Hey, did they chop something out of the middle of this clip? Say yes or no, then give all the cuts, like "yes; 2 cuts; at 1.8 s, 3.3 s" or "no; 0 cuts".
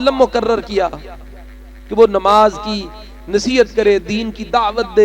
no; 0 cuts